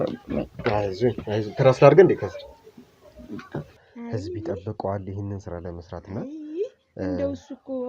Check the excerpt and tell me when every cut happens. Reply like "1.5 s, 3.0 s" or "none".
3.8 s